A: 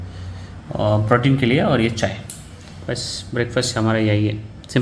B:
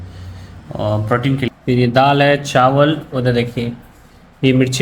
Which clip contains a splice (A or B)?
B